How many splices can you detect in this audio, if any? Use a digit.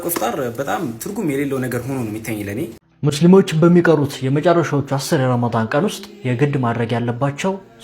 1